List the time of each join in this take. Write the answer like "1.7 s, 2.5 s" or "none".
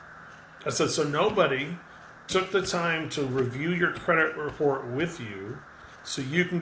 none